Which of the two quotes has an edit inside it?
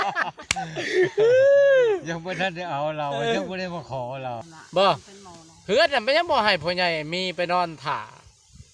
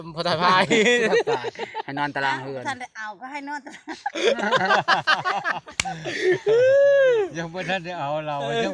first; 1 cut; at 4.4 s

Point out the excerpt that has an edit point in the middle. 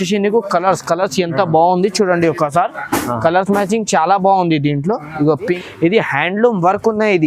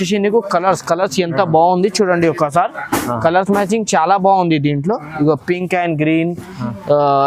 first; 1 cut; at 5.6 s

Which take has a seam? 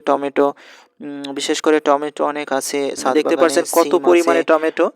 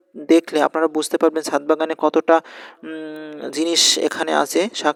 first; 1 cut; at 3.1 s

